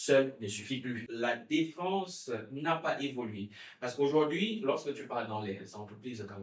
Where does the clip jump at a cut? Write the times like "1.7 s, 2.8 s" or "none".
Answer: 1.0 s